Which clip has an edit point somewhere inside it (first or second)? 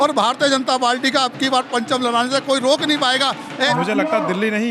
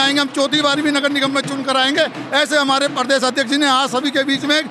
first